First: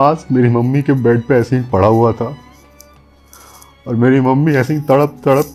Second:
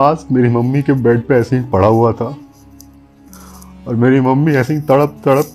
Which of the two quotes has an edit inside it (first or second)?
second